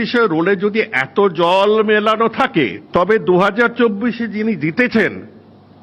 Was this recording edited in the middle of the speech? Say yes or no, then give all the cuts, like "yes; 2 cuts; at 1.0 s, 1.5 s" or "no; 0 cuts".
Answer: yes; 1 cut; at 2.8 s